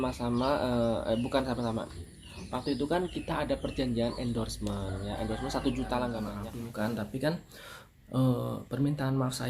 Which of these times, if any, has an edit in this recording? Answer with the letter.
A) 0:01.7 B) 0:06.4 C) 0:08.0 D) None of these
B